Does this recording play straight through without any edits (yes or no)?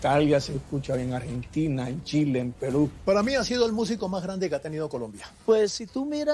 no